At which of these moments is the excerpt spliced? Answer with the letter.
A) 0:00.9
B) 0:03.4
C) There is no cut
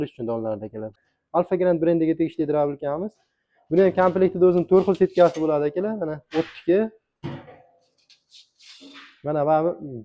A